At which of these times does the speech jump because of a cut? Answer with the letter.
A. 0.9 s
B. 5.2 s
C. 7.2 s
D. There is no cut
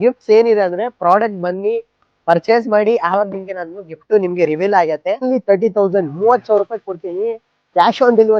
B